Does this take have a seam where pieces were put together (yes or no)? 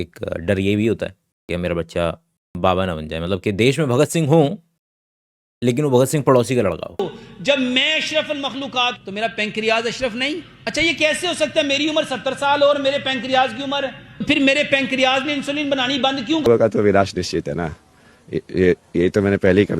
yes